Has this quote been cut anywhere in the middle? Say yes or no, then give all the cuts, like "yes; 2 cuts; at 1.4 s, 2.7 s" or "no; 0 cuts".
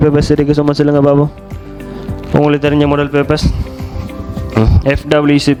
no; 0 cuts